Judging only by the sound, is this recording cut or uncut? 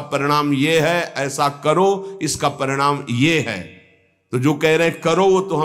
uncut